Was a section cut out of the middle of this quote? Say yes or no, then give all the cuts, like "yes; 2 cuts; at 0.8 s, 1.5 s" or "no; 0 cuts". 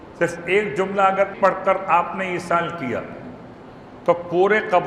yes; 1 cut; at 1.3 s